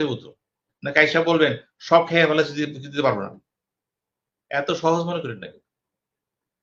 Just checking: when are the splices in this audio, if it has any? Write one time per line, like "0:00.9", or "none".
none